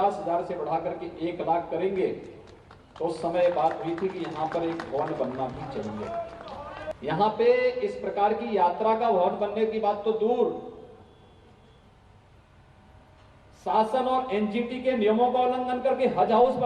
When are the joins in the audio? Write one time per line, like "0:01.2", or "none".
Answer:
0:06.9